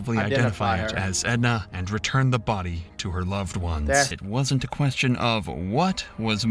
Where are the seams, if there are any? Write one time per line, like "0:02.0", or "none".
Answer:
0:04.2